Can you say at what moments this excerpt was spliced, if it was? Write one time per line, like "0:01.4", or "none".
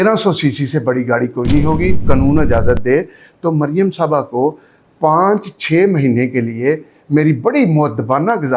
0:02.0